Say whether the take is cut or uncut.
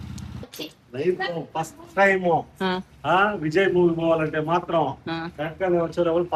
uncut